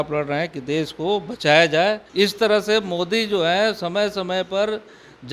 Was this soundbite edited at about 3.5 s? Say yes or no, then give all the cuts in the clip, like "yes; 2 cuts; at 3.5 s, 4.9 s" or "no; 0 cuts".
no; 1 cut; at 2.0 s